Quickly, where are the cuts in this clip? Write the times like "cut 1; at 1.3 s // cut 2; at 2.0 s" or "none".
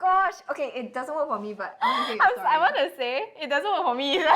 none